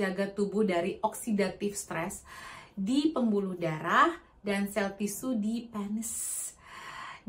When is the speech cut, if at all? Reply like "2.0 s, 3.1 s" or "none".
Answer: none